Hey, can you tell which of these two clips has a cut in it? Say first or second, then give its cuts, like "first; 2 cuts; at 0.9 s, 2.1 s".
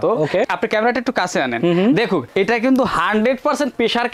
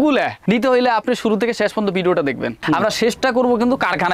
second; 1 cut; at 2.6 s